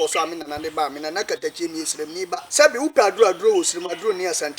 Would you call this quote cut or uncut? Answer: cut